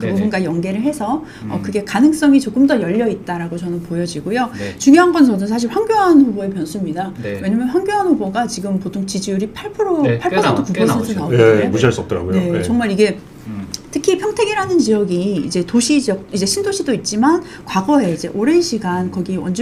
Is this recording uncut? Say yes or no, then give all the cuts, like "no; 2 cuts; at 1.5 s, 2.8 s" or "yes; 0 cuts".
yes; 0 cuts